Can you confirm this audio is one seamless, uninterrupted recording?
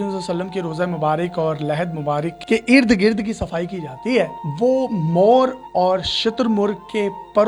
yes; 0 cuts

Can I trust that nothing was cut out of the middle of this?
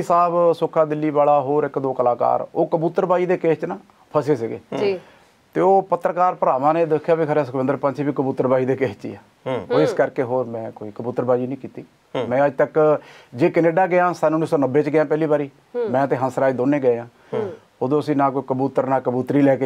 yes; 0 cuts

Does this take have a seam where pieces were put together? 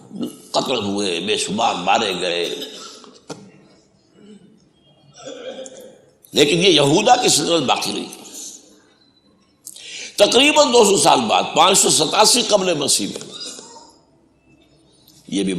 no; 0 cuts

